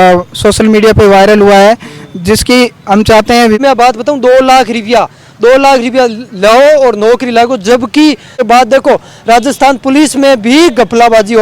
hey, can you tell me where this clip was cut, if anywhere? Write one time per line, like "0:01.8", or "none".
0:03.6
0:08.4